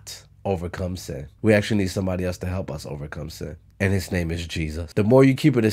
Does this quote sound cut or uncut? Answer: cut